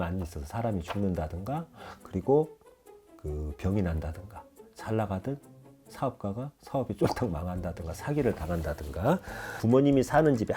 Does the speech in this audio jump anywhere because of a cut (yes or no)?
yes